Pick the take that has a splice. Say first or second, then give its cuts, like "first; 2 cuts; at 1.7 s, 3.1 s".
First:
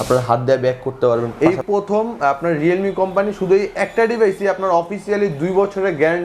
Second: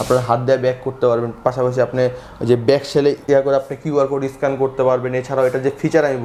first; 1 cut; at 1.3 s